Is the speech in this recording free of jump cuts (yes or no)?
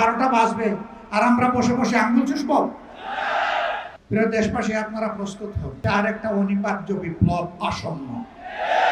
no